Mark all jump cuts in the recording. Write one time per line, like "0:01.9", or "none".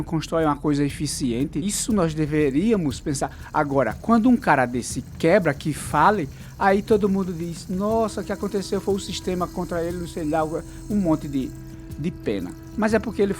0:01.6